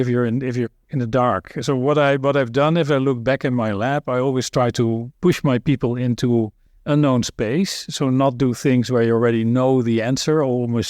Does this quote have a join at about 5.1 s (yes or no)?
yes